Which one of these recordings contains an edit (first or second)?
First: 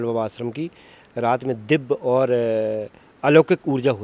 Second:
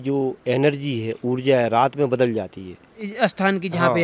second